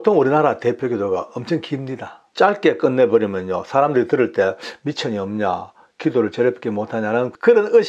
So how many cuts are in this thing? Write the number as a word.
one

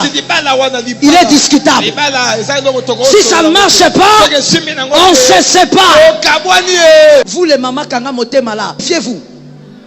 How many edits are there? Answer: two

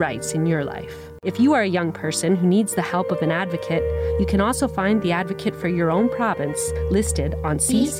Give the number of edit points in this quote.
one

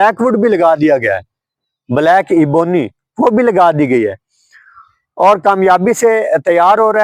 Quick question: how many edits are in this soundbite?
zero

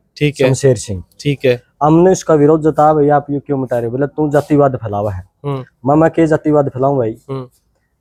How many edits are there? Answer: zero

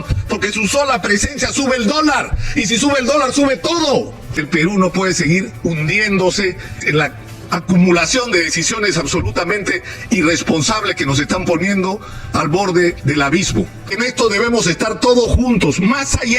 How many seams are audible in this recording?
three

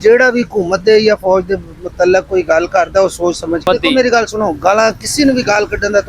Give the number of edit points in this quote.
one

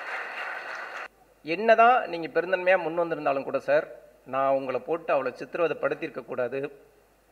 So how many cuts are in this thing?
one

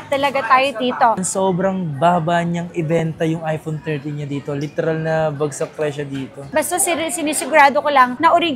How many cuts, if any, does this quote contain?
two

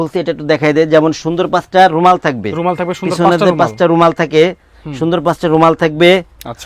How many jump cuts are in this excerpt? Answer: zero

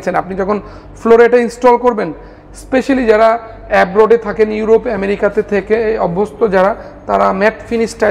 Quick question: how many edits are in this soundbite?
zero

